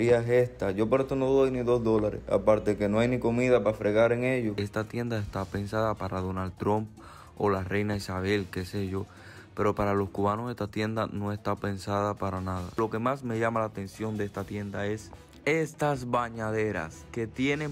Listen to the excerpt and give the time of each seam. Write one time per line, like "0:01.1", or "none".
0:04.6
0:12.8